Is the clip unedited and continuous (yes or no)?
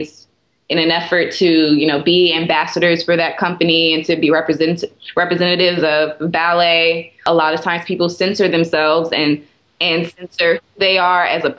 yes